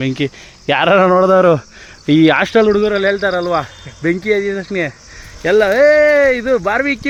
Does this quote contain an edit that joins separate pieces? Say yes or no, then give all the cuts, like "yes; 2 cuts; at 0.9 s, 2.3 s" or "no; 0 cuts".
no; 0 cuts